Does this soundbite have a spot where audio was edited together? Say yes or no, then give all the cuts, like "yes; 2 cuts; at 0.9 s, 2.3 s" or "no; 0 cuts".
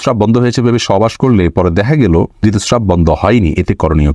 yes; 1 cut; at 2.3 s